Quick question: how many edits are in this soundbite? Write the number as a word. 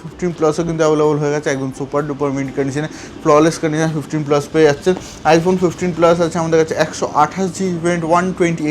zero